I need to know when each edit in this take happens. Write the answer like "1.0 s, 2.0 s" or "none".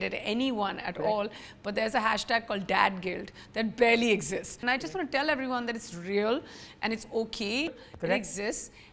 4.5 s, 7.9 s